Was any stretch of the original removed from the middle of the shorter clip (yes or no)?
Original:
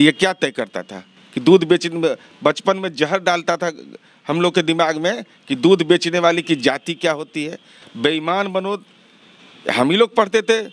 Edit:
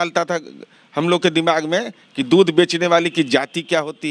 no